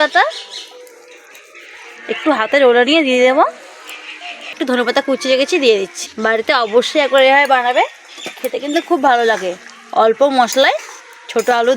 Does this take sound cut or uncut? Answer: cut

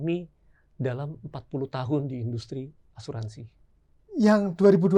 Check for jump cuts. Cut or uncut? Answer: uncut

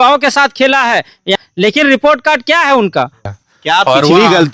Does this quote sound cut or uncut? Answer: cut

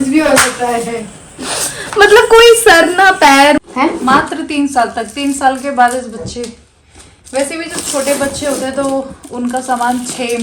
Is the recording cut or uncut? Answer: cut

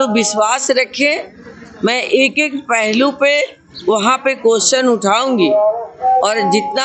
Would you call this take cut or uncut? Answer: uncut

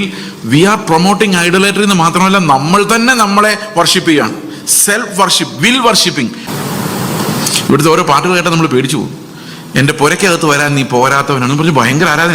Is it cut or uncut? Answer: cut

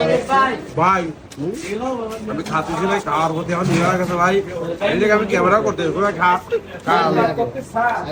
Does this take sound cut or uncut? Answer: uncut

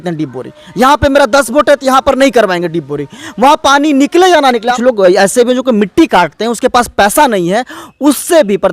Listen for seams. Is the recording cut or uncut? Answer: cut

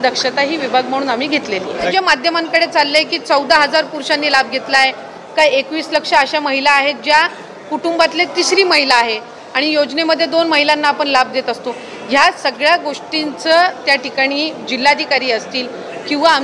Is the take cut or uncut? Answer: cut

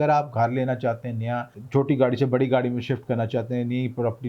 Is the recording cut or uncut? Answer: cut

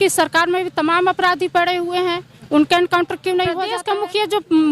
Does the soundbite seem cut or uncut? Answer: cut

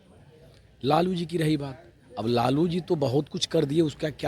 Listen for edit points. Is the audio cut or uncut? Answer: uncut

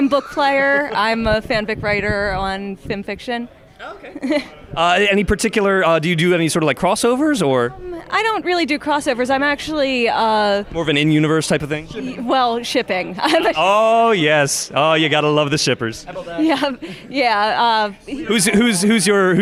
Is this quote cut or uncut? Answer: uncut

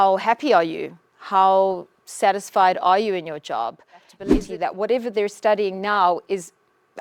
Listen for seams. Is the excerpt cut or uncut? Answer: cut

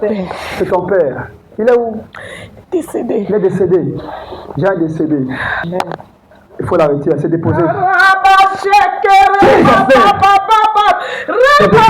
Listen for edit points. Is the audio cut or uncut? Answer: cut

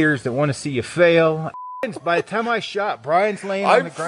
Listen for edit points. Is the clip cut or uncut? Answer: cut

